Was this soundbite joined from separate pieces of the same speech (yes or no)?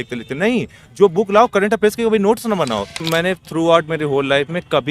yes